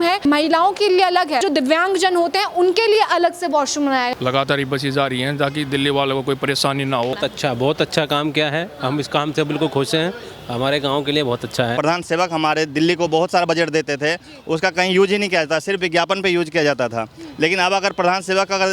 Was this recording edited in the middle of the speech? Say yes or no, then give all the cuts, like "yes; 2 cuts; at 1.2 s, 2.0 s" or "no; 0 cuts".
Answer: yes; 4 cuts; at 1.4 s, 4.1 s, 7.2 s, 11.7 s